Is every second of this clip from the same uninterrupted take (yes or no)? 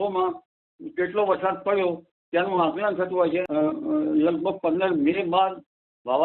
no